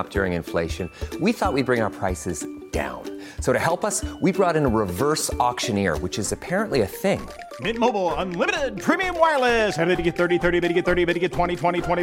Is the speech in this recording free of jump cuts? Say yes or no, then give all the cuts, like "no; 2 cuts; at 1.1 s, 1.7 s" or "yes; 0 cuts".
yes; 0 cuts